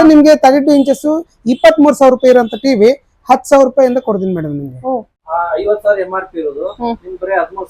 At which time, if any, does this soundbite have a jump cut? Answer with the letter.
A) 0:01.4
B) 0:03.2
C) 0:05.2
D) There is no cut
C